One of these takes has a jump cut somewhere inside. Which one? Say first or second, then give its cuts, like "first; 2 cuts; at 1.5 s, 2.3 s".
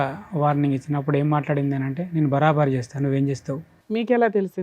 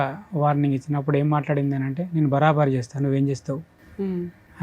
first; 1 cut; at 3.7 s